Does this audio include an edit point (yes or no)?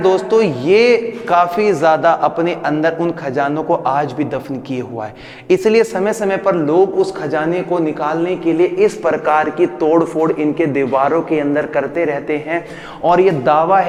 no